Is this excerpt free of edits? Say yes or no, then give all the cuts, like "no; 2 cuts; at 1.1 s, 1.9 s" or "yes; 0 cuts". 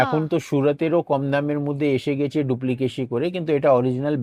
yes; 0 cuts